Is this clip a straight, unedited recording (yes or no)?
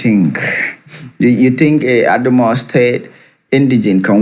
yes